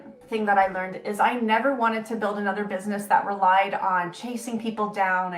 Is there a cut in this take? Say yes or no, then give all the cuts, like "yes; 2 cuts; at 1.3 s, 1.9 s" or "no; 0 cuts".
no; 0 cuts